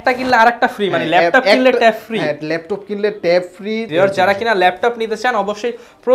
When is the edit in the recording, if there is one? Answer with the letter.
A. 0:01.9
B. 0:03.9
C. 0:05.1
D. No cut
B